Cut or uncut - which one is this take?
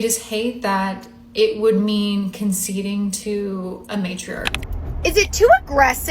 cut